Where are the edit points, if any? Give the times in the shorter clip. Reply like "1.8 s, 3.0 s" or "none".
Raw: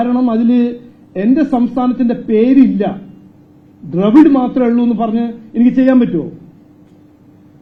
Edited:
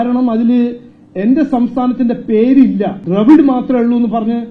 3.0 s